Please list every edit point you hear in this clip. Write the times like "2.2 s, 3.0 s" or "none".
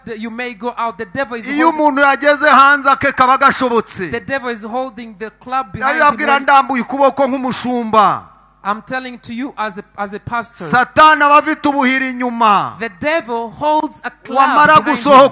none